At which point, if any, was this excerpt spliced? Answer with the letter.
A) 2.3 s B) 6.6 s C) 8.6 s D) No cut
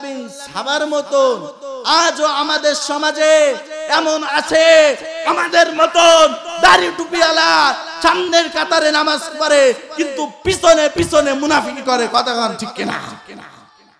D